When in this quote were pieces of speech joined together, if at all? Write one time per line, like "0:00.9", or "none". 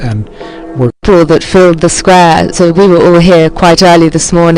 0:01.7